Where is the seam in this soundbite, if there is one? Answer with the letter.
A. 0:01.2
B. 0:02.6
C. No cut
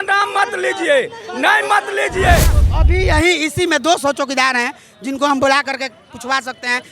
B